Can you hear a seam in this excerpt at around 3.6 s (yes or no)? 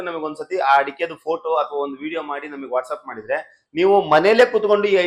yes